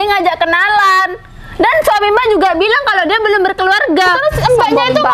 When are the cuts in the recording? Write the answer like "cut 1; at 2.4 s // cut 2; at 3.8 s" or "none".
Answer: cut 1; at 4.0 s